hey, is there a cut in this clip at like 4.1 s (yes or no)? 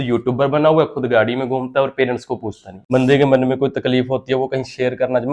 no